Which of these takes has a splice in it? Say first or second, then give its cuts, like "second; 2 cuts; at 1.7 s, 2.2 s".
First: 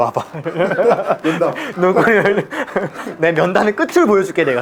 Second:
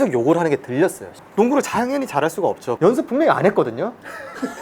second; 2 cuts; at 1.1 s, 2.7 s